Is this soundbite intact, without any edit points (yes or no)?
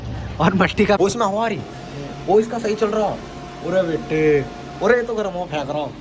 no